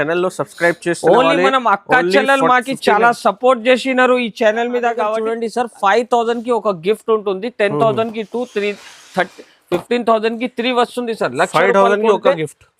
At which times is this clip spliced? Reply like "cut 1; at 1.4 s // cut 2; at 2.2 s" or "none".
cut 1; at 5.2 s